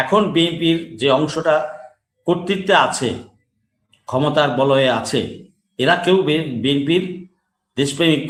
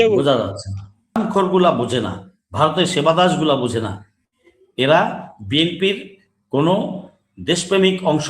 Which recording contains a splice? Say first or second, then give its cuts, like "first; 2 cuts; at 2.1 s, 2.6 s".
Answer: second; 1 cut; at 1.2 s